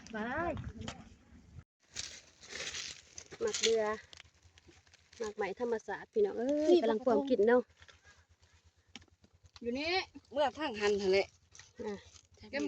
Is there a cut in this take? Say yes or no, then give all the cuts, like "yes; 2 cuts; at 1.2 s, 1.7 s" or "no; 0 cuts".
yes; 1 cut; at 1.8 s